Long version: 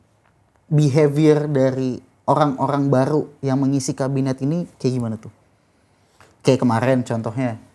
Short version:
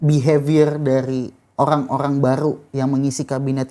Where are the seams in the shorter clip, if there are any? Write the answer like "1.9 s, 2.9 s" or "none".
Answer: none